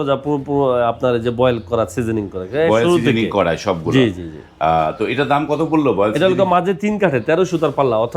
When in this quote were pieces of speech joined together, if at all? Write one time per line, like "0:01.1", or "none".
none